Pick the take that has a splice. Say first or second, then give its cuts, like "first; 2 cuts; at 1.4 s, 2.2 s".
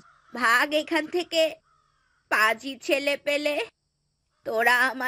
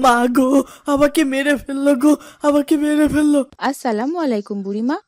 second; 1 cut; at 3.5 s